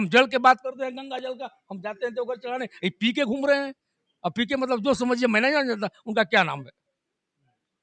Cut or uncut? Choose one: uncut